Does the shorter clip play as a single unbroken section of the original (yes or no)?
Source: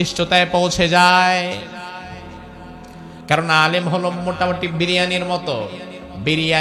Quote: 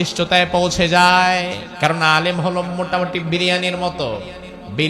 no